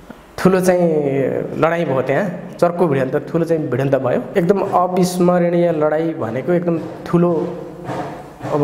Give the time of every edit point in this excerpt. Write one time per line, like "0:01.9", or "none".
0:04.3